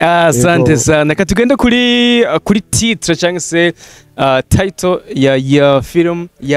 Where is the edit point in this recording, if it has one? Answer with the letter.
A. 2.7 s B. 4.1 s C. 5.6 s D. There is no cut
D